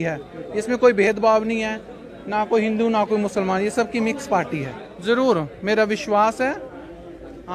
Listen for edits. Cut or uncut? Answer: cut